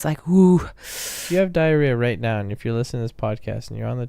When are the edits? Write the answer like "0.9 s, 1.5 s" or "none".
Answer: 1.2 s